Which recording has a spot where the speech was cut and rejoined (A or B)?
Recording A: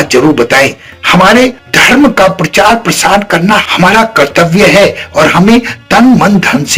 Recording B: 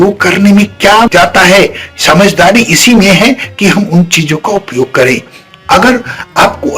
B